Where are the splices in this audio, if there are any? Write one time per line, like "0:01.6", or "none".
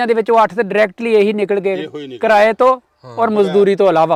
none